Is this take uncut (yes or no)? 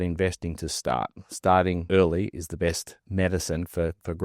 no